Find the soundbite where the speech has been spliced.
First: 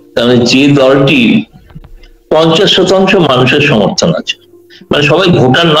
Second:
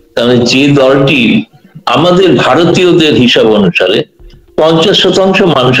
first; 1 cut; at 1.8 s

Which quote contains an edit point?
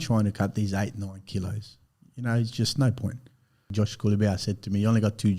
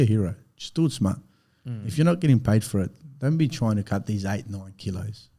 first; 1 cut; at 3.7 s

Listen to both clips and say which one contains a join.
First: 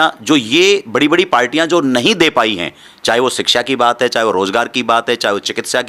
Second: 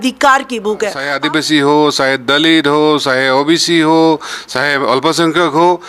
second; 1 cut; at 1.0 s

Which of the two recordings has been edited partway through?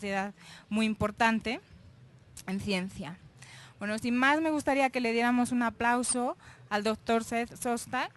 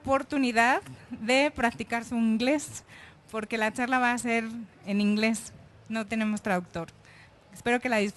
first; 1 cut; at 5.1 s

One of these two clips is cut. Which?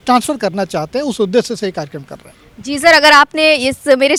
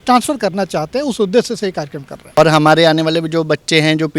second; 1 cut; at 2.4 s

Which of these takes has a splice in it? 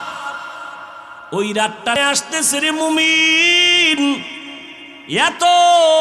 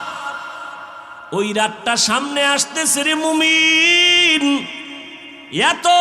first; 1 cut; at 2.0 s

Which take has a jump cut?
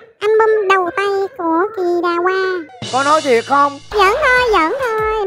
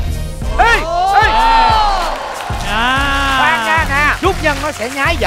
first; 1 cut; at 3.8 s

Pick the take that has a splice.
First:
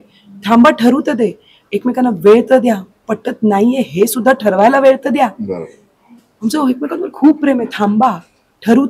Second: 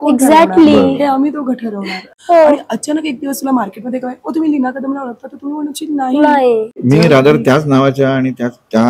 second; 2 cuts; at 2.1 s, 6.7 s

